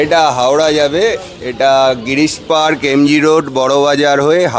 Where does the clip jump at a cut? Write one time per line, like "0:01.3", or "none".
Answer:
none

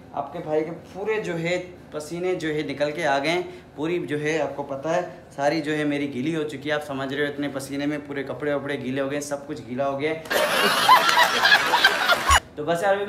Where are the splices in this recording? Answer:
none

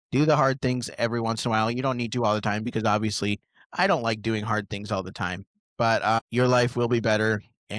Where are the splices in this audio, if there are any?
none

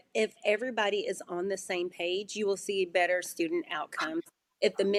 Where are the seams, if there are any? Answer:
none

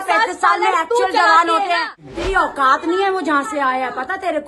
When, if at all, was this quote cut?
0:01.8

